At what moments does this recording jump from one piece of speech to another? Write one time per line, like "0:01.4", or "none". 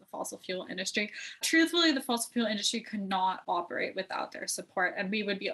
0:01.4